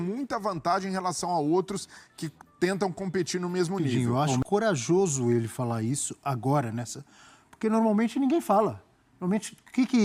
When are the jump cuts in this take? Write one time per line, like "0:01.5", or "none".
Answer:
0:03.9